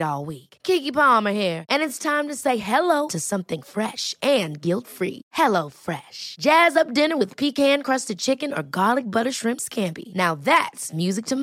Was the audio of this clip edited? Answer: no; 0 cuts

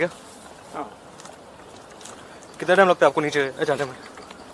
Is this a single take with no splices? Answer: yes; 0 cuts

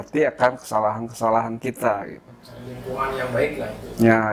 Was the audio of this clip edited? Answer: no; 0 cuts

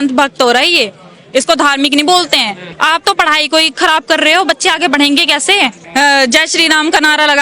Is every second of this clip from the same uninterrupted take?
no; 2 cuts; at 2.7 s, 5.8 s

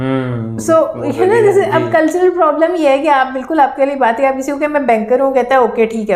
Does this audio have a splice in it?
no; 0 cuts

